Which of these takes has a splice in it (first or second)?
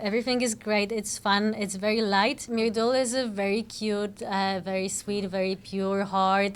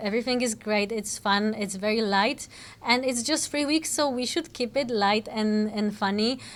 first